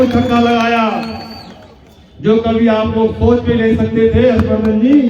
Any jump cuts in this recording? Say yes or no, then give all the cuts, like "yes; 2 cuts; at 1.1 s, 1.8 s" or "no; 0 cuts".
no; 0 cuts